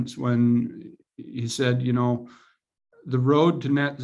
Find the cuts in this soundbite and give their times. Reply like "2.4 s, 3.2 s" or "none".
none

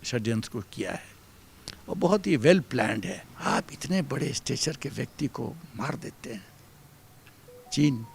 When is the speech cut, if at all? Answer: 3.3 s

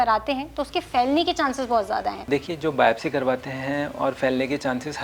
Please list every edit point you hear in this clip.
2.2 s

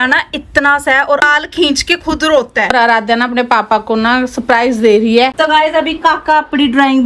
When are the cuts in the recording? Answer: 1.2 s, 2.7 s, 5.3 s

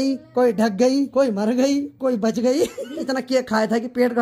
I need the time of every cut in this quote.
1.1 s, 3.0 s

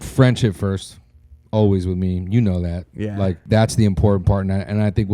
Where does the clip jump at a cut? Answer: 3.4 s

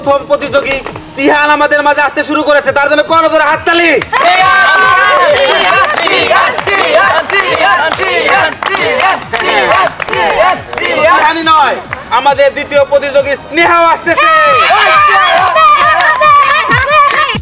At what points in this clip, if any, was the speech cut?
none

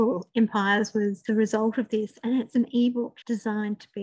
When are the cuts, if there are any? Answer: 1.2 s, 3.2 s

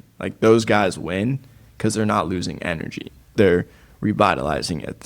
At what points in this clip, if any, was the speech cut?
3.3 s

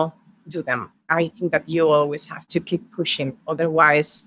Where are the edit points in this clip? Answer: 1.1 s

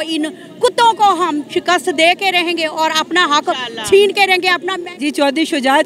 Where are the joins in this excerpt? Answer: 4.6 s

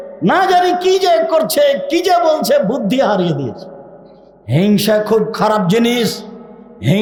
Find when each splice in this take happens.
none

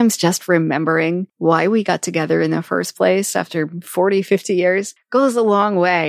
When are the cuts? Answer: 1.3 s, 4.9 s

